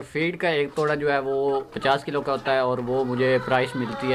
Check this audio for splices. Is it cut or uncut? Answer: uncut